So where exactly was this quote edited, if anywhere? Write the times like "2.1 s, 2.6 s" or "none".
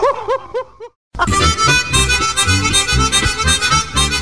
1.1 s